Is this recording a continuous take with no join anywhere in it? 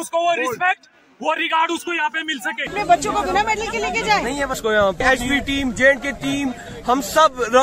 no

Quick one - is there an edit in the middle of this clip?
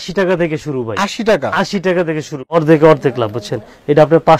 yes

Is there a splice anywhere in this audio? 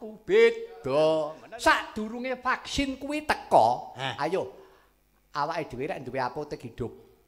yes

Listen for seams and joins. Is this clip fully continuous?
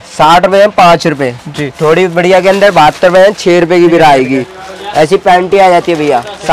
yes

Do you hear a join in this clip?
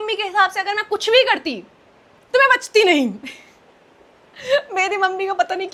no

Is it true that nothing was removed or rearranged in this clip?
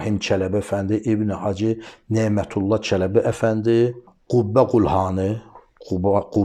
no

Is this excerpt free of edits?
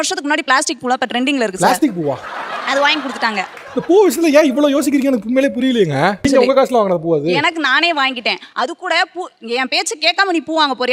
no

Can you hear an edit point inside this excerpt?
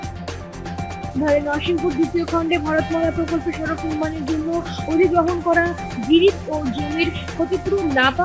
yes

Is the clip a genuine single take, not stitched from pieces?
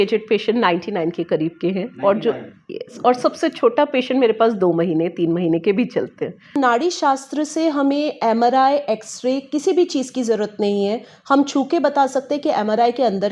no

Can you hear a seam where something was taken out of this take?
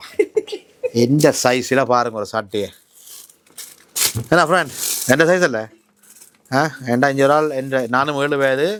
no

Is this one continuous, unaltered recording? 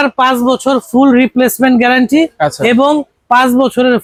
yes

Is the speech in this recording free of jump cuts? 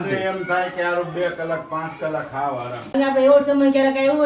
no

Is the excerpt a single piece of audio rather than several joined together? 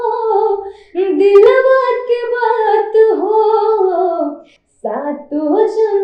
yes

